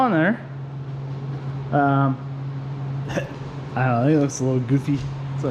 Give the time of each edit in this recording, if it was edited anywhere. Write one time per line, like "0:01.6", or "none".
none